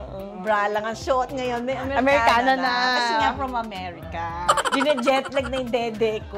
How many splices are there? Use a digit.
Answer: 1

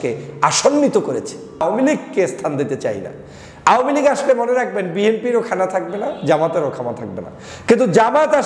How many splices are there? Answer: 1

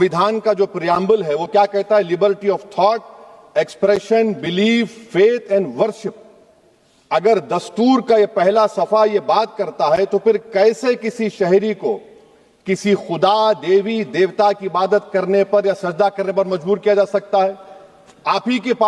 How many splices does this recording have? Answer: 0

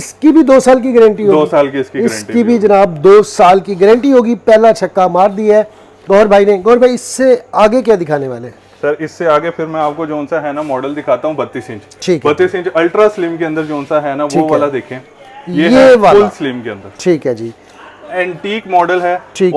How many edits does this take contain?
0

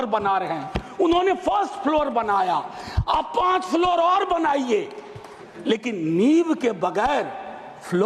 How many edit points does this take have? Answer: 0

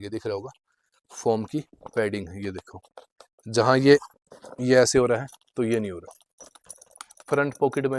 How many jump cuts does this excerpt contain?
0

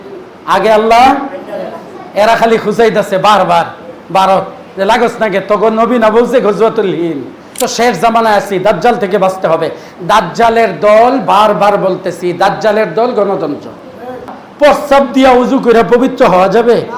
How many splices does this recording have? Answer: 1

